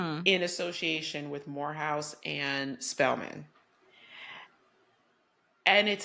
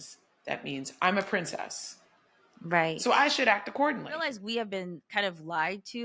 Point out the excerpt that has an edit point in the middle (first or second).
second